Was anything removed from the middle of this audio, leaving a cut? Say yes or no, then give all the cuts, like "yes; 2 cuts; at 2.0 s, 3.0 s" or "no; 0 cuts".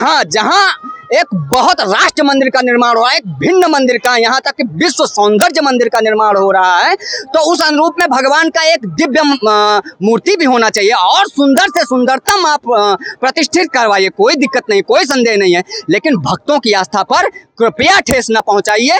no; 0 cuts